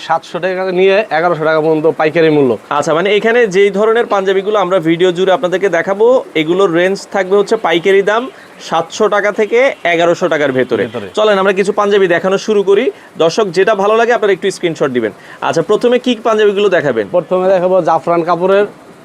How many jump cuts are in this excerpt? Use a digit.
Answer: 0